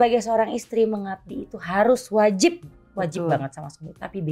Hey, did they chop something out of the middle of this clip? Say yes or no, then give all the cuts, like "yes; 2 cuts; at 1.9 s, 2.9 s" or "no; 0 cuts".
no; 0 cuts